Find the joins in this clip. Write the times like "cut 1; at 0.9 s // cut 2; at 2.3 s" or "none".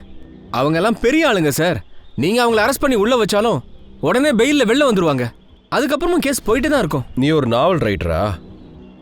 cut 1; at 7.0 s